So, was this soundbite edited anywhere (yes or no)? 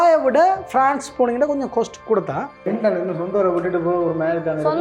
yes